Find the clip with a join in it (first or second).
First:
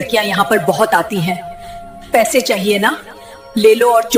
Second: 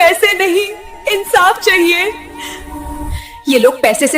second